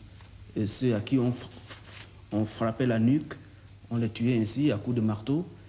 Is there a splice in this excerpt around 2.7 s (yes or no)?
no